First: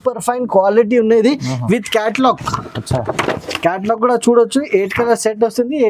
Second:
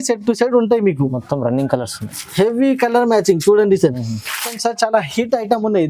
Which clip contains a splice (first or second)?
second